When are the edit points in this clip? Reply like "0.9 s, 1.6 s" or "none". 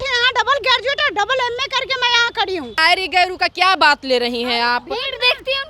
2.7 s